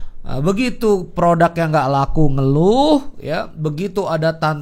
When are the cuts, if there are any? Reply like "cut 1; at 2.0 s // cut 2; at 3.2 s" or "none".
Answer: none